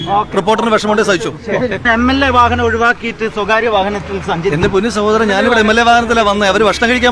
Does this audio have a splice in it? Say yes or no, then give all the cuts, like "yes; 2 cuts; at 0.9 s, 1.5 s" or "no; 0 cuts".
yes; 1 cut; at 1.8 s